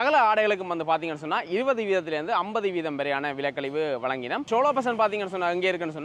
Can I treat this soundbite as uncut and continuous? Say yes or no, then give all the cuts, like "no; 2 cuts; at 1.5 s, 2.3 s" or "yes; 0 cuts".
yes; 0 cuts